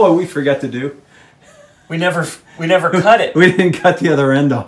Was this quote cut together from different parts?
no; 0 cuts

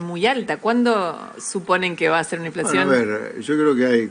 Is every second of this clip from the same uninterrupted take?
yes; 0 cuts

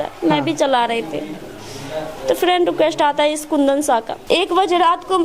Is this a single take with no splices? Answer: no; 1 cut; at 4.1 s

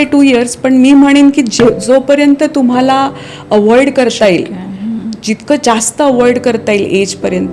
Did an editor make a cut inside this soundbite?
no; 0 cuts

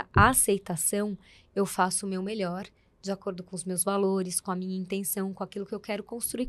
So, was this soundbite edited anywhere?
no; 0 cuts

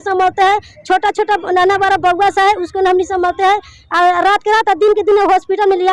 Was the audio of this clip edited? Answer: no; 0 cuts

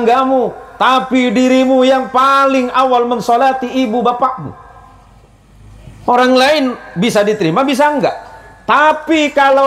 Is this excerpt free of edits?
yes; 0 cuts

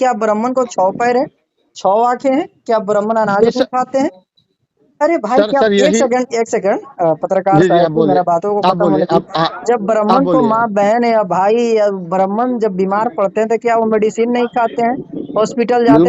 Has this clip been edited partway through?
no; 0 cuts

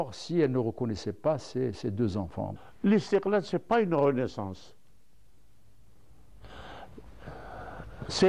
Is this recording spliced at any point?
yes; 1 cut; at 2.6 s

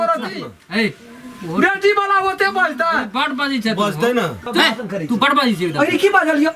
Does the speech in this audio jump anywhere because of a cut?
yes; 1 cut; at 4.4 s

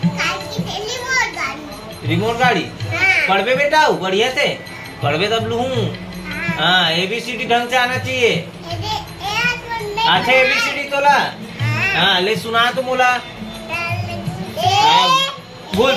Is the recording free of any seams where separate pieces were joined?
yes; 0 cuts

